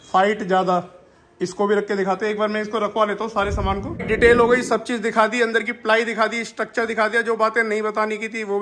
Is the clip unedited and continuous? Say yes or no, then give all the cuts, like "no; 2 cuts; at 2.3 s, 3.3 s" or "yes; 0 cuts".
no; 1 cut; at 4.1 s